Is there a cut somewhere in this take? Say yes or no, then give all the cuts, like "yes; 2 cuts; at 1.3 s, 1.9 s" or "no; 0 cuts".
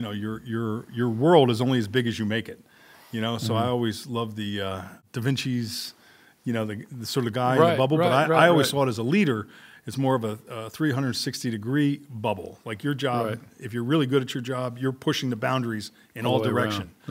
yes; 1 cut; at 5.0 s